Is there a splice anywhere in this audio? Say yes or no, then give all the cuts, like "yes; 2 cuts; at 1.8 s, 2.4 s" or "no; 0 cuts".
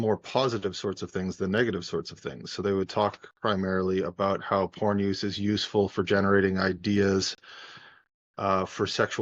no; 0 cuts